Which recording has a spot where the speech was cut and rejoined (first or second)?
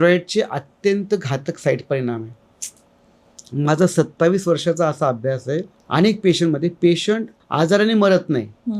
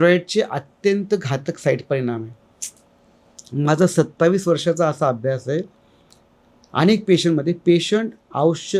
first